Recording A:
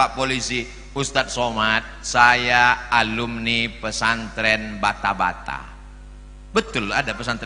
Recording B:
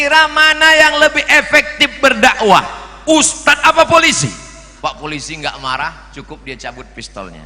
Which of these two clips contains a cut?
B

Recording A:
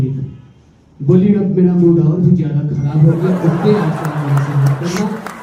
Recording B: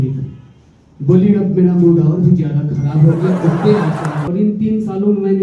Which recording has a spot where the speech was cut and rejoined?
B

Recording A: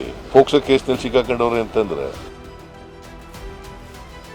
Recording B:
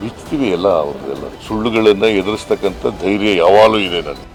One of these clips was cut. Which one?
A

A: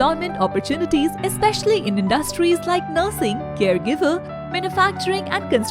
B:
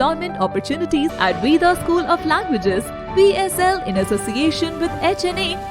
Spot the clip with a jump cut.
B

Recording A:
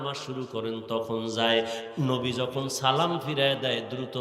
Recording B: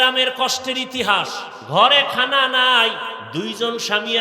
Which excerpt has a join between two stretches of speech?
B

